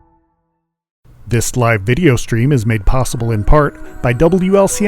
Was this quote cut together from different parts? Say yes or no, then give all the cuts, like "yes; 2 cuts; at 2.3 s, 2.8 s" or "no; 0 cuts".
yes; 1 cut; at 1.2 s